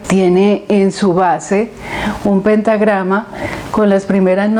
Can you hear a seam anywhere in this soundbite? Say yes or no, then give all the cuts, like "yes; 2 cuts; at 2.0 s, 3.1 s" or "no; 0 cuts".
no; 0 cuts